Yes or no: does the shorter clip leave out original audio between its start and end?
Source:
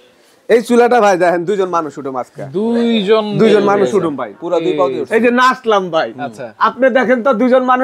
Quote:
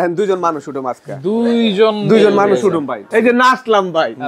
yes